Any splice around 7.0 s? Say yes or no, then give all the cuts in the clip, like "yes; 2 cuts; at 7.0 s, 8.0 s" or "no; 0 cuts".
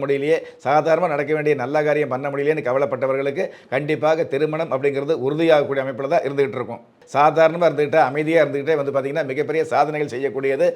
yes; 1 cut; at 7.0 s